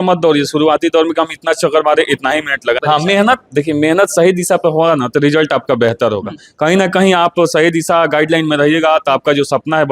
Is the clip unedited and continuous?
no; 1 cut; at 2.8 s

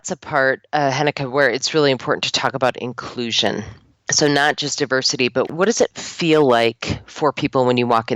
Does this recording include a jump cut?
no; 0 cuts

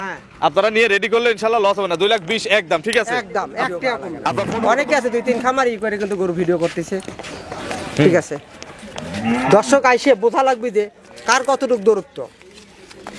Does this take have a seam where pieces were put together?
yes; 1 cut; at 4.4 s

